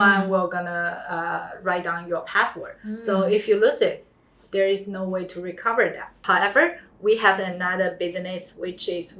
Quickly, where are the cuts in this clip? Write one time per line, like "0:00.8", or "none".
0:06.1